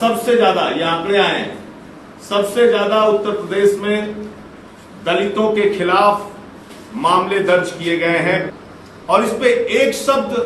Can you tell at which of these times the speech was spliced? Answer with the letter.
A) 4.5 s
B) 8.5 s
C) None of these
B